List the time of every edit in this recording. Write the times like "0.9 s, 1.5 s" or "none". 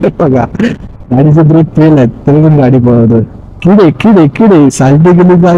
3.4 s